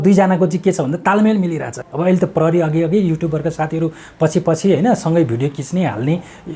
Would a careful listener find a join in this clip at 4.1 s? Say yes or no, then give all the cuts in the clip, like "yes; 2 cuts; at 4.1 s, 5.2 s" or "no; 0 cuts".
no; 1 cut; at 1.7 s